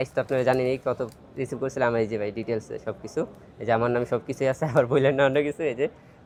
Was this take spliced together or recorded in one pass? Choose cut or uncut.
uncut